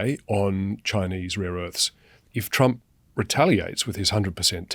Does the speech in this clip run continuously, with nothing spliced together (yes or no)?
no